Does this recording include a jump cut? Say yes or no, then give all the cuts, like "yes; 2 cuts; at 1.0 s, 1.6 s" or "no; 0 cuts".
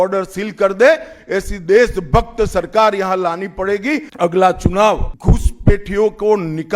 yes; 2 cuts; at 4.1 s, 5.1 s